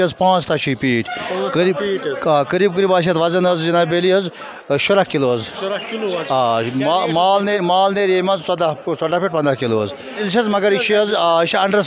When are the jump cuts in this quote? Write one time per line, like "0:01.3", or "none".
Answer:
0:10.2